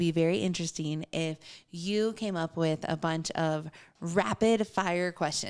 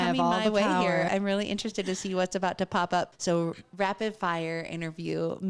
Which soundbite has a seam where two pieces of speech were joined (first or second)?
second